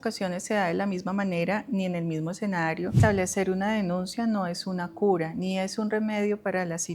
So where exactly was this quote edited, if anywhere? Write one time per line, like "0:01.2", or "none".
0:03.0